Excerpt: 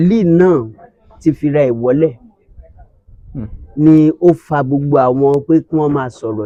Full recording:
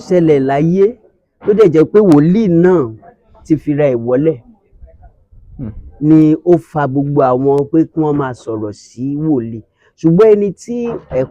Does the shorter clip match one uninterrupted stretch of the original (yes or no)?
yes